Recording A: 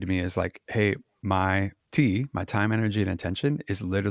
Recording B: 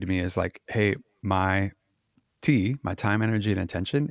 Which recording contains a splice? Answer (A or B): A